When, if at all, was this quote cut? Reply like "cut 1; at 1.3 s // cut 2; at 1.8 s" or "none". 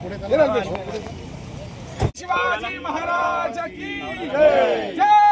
cut 1; at 2.2 s